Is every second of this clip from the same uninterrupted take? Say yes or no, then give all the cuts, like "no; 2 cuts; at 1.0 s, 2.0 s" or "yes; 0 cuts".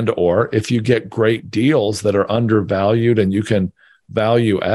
yes; 0 cuts